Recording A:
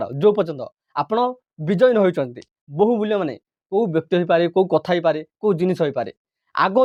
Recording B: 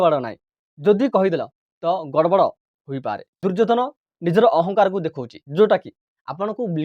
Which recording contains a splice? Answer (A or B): B